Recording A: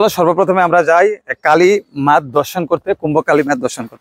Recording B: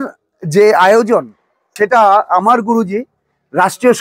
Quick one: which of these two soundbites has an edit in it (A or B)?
B